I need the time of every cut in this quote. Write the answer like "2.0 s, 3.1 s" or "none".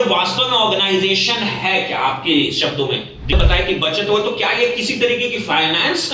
3.3 s